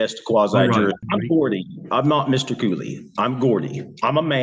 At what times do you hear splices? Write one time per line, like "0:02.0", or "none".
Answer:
0:01.0